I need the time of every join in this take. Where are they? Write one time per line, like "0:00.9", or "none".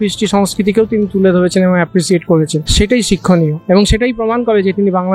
0:02.6